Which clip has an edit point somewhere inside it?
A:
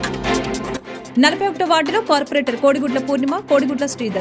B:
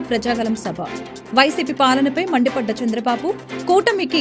A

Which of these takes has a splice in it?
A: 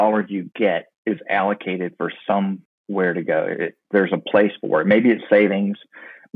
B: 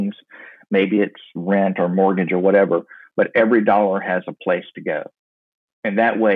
A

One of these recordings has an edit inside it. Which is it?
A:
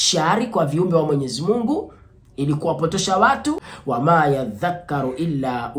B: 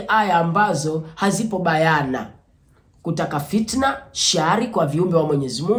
A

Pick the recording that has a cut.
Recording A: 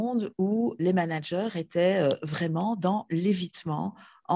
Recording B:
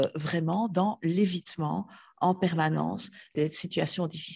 B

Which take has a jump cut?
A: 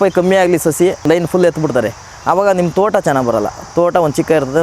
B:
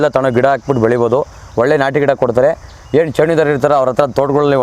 A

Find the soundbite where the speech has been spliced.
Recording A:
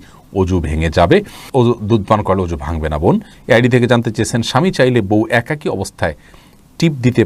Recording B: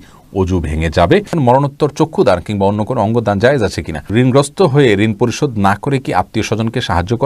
B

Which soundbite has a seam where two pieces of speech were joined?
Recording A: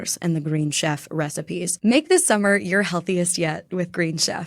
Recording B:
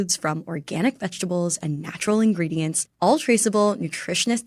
A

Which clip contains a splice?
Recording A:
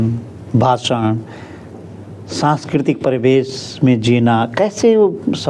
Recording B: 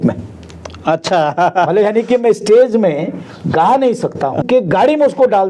B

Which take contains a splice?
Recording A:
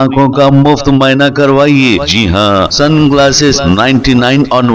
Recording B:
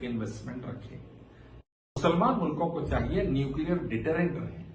B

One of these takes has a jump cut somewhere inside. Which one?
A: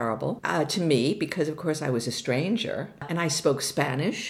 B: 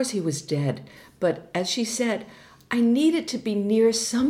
A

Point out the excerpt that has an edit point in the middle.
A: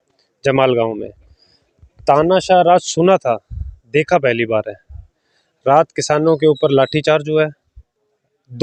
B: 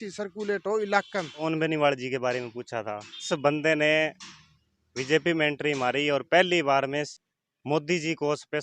B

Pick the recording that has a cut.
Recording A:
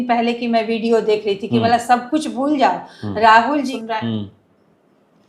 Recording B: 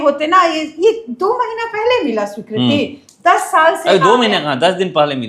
A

